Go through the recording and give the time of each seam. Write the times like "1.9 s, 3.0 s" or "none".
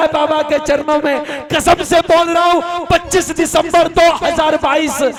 none